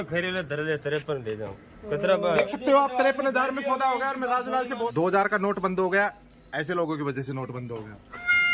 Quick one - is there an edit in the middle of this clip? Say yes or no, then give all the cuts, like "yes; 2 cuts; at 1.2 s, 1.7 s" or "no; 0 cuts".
yes; 2 cuts; at 2.5 s, 4.9 s